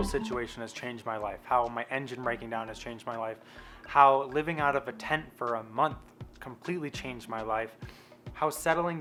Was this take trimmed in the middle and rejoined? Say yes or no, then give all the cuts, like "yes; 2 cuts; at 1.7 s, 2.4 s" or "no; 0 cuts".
no; 0 cuts